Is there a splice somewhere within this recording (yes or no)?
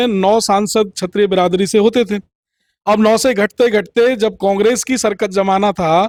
no